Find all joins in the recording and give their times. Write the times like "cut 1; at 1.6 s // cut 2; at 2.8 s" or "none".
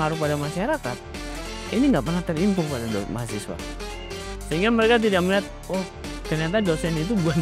none